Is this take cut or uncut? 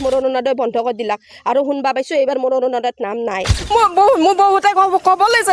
cut